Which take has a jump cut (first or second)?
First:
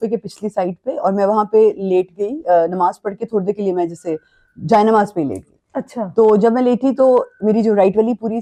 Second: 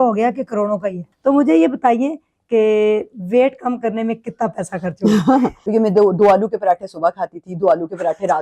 second